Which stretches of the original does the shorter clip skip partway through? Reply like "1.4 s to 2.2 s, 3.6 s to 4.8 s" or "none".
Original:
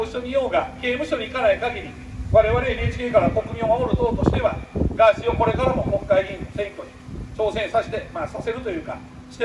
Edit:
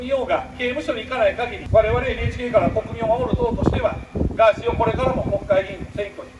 1.8 s to 2.2 s